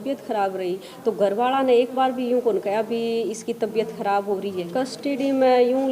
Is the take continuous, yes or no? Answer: no